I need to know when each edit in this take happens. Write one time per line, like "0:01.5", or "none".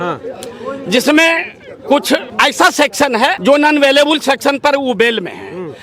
0:02.3
0:03.4